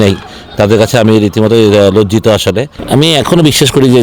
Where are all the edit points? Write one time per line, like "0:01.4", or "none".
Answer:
0:02.8